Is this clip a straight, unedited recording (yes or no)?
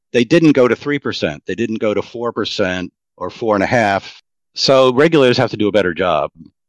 no